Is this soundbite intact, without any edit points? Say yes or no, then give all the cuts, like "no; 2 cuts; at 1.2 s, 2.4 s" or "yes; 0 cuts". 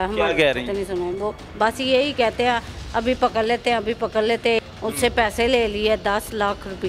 no; 1 cut; at 4.6 s